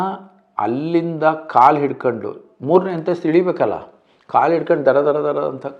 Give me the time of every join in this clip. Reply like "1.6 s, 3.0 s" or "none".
none